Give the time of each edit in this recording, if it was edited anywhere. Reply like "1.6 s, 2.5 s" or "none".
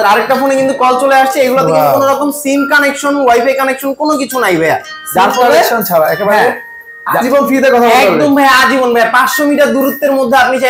none